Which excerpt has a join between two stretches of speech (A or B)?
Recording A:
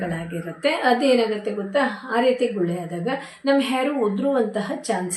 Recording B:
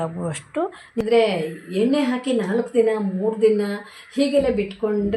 B